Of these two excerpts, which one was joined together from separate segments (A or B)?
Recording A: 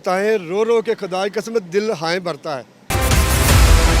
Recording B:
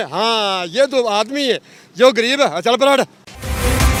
A